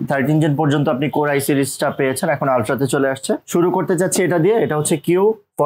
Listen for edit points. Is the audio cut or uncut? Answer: uncut